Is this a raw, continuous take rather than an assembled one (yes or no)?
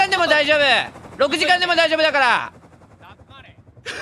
yes